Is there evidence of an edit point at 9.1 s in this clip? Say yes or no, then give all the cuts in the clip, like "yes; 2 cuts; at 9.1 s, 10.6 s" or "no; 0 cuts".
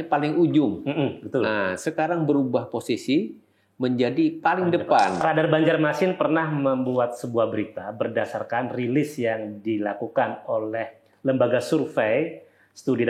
no; 1 cut; at 5.2 s